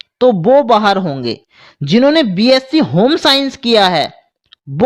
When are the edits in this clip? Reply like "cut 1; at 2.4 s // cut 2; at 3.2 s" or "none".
none